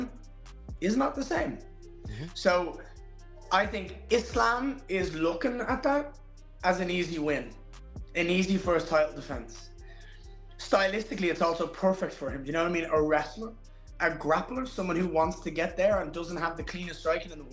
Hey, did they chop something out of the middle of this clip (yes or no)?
no